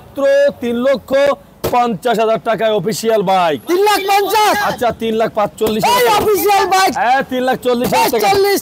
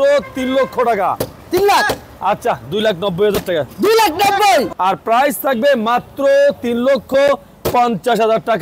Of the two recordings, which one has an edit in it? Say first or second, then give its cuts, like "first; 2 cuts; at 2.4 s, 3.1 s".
second; 1 cut; at 4.7 s